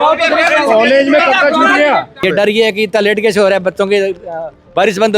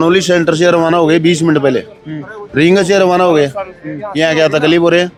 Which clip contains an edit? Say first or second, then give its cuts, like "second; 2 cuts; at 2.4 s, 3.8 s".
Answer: first; 1 cut; at 2.2 s